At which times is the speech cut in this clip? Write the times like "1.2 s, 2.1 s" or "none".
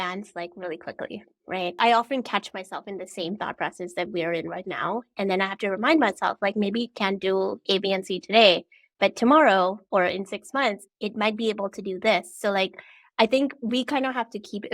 1.8 s